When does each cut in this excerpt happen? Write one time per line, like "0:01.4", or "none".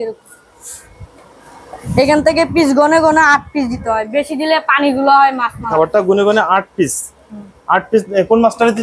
0:05.7